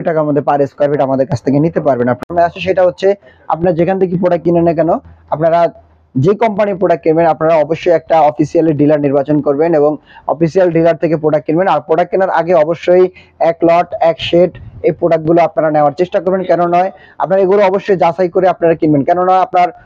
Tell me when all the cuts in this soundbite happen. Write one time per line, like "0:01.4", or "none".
0:02.2